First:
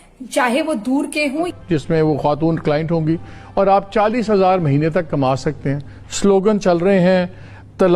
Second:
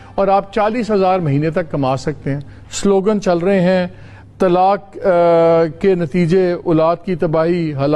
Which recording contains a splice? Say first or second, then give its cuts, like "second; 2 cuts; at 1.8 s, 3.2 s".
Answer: first; 1 cut; at 1.5 s